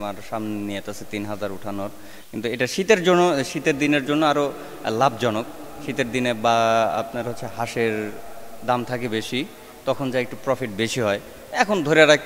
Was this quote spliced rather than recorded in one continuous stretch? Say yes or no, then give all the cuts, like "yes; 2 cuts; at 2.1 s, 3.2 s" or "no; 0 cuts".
no; 0 cuts